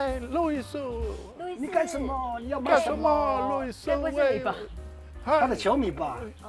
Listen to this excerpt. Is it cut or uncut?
uncut